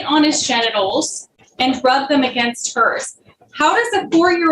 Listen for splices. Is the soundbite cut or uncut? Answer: uncut